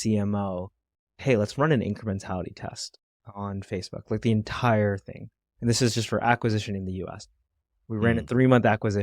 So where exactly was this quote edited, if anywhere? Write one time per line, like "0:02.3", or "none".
0:01.1